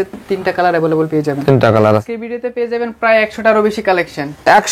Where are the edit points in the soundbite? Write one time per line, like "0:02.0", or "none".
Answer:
0:02.0